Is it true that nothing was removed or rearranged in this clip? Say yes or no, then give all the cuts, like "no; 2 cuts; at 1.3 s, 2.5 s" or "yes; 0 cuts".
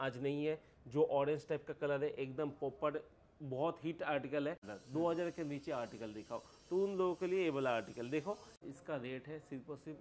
no; 2 cuts; at 4.7 s, 8.1 s